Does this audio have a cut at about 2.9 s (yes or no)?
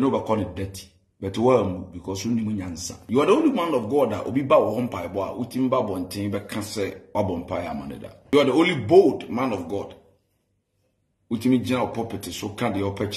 yes